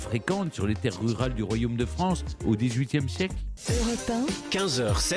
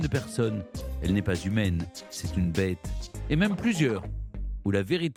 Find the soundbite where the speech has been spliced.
first; 1 cut; at 3.5 s

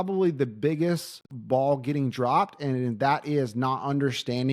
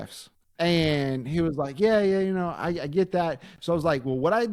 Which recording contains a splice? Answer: first; 1 cut; at 1.2 s

